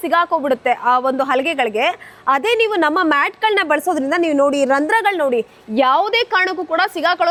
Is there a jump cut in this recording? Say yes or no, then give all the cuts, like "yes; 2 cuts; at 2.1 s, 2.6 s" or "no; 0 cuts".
no; 0 cuts